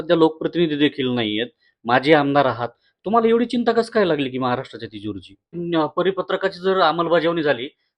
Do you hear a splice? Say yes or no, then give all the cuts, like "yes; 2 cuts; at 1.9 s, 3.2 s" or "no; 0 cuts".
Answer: yes; 1 cut; at 5.6 s